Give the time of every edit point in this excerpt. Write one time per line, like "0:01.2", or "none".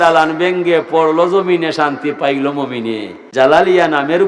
0:03.2